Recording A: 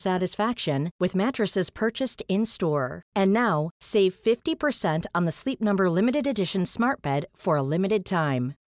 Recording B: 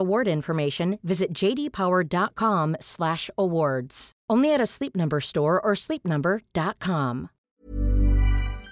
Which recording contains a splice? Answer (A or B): B